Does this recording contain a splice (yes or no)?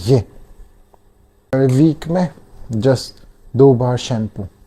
yes